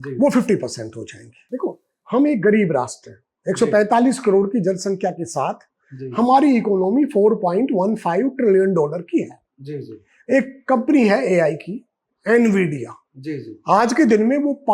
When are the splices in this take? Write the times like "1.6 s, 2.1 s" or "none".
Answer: 1.4 s